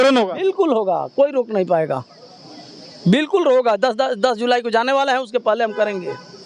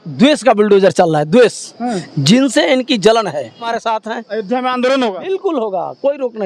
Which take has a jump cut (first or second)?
second